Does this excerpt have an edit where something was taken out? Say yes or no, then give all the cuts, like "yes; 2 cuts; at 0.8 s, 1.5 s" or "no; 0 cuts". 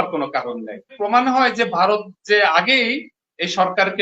yes; 1 cut; at 0.9 s